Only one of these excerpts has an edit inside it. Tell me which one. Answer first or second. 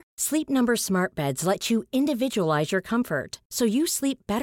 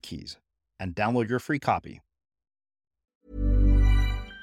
second